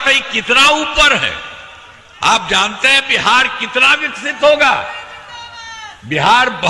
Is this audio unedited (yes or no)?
yes